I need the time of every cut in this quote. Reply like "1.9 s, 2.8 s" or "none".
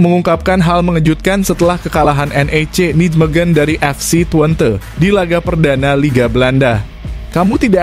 none